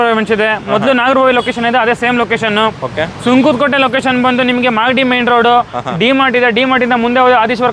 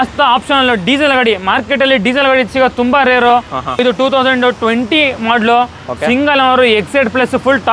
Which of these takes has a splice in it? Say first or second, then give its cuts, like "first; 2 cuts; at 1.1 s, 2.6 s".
second; 1 cut; at 3.8 s